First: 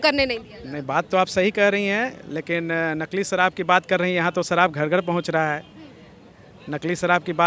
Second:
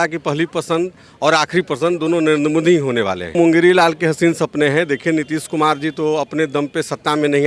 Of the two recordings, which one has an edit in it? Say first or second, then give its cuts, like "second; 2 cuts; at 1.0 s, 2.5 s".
second; 1 cut; at 3.3 s